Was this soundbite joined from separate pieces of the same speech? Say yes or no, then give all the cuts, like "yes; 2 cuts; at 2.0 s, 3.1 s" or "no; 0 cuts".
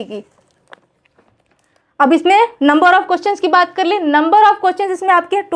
no; 0 cuts